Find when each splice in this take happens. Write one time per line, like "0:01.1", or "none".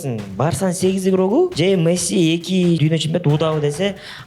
0:01.5
0:02.8